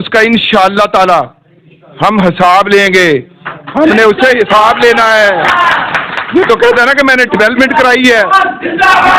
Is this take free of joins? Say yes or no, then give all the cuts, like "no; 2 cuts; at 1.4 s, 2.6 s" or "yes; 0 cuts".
yes; 0 cuts